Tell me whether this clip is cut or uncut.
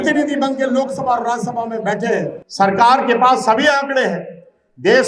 cut